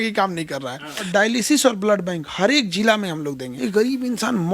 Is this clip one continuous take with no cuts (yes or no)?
no